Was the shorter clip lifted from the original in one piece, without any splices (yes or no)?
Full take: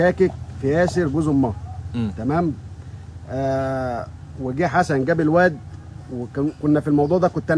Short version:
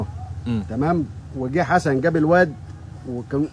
no